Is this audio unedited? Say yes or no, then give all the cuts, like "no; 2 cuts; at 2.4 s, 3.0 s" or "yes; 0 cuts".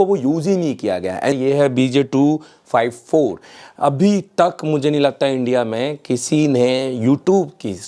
no; 1 cut; at 1.3 s